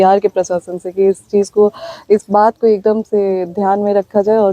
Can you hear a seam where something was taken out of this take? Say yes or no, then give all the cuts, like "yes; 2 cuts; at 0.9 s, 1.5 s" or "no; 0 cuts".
no; 0 cuts